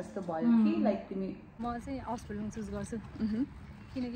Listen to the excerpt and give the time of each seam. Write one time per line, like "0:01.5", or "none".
0:01.6